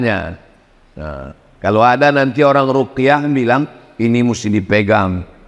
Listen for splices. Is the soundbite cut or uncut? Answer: uncut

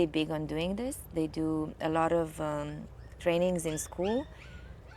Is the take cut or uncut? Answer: uncut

